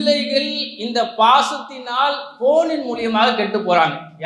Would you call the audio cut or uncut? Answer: uncut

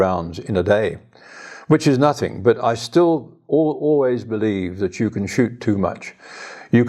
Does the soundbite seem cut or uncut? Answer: uncut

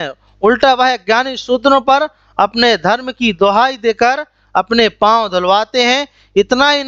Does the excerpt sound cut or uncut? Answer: uncut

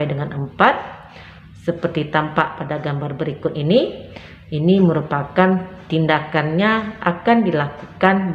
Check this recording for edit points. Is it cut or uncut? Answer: uncut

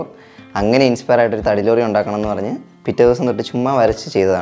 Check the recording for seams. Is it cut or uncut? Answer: uncut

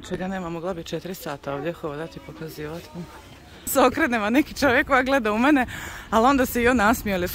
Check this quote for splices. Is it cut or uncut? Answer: cut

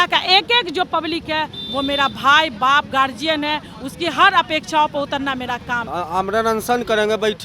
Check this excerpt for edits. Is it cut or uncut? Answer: cut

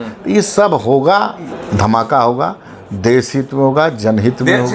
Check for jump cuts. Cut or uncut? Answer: cut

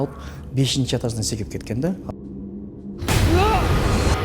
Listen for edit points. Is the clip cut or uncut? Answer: cut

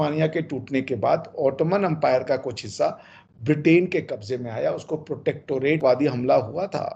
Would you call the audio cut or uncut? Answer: cut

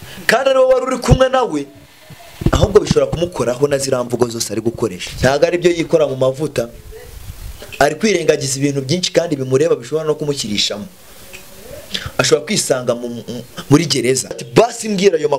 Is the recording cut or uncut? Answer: cut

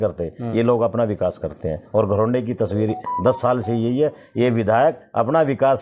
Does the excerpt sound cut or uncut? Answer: uncut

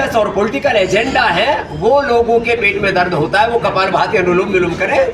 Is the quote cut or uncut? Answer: uncut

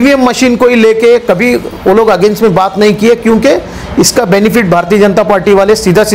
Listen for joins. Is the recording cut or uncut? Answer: uncut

